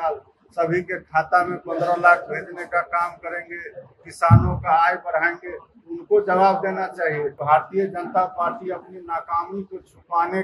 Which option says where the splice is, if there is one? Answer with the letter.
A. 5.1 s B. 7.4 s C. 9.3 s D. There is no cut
B